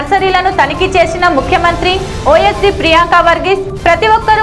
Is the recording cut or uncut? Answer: uncut